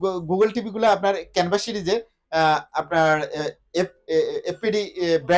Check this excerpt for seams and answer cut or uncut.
uncut